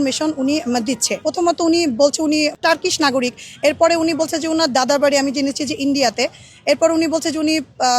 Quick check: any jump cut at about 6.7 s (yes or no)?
no